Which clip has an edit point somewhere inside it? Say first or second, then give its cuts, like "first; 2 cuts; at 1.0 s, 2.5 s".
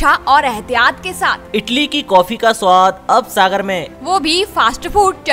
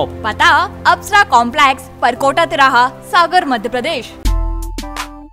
second; 1 cut; at 4.1 s